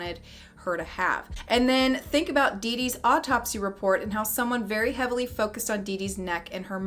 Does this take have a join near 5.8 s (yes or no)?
no